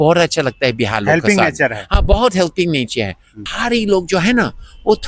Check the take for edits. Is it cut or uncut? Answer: cut